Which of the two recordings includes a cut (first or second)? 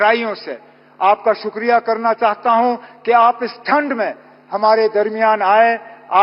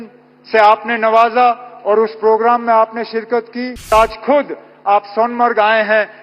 second